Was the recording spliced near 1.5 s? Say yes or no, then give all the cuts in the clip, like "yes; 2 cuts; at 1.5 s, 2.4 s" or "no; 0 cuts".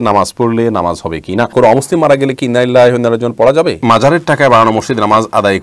yes; 2 cuts; at 1.5 s, 3.8 s